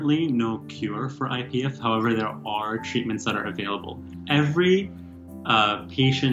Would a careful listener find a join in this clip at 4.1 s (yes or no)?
yes